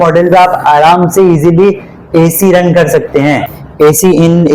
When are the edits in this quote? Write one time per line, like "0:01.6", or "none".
0:03.6